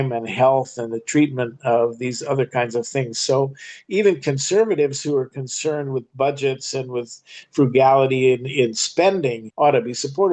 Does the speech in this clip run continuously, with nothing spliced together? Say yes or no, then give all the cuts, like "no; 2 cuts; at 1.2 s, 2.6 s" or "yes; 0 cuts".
no; 1 cut; at 9.4 s